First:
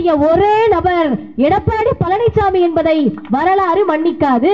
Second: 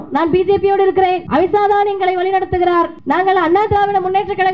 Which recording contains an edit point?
second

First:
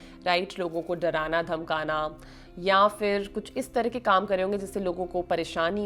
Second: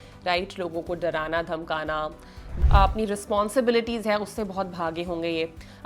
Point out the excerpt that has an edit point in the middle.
second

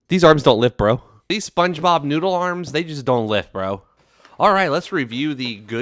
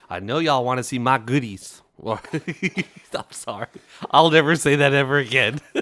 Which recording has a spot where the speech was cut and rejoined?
first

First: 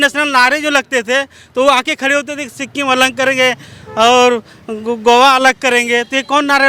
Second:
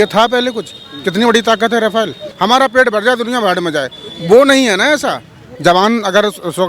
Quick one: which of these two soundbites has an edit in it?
second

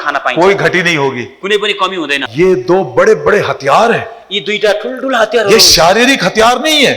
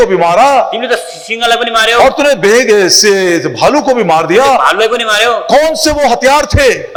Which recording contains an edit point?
first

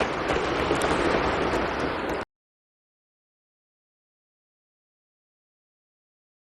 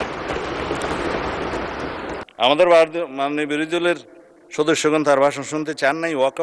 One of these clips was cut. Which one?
second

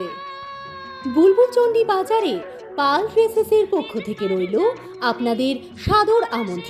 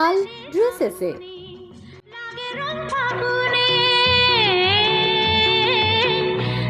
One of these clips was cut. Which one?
second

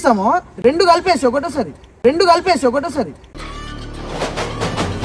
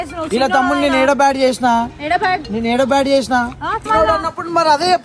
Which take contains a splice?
second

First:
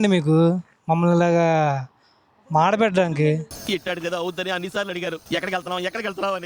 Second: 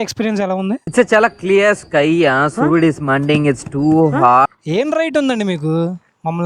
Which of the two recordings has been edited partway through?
second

